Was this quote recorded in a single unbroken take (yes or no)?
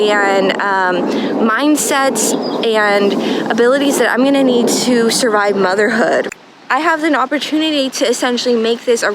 no